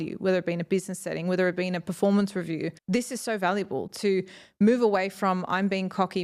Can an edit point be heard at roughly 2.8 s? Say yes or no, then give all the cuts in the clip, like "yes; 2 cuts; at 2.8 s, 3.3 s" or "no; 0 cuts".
yes; 1 cut; at 2.8 s